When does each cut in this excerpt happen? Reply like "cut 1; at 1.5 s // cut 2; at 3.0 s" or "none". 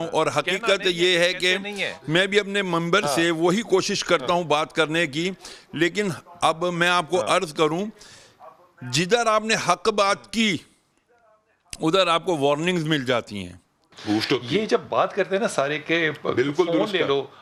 none